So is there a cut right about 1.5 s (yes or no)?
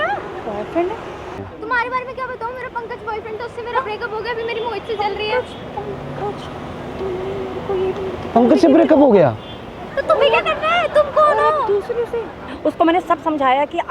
yes